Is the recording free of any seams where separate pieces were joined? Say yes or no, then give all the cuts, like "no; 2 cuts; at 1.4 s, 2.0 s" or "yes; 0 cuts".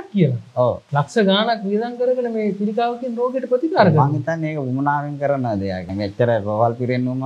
no; 2 cuts; at 0.8 s, 5.9 s